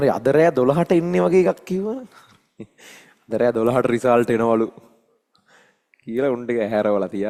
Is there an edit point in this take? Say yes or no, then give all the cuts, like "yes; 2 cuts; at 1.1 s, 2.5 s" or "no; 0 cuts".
no; 0 cuts